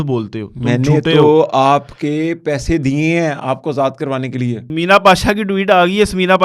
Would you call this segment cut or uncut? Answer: cut